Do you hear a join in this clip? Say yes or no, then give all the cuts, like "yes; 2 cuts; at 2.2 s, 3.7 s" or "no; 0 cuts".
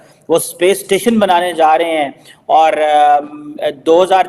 no; 0 cuts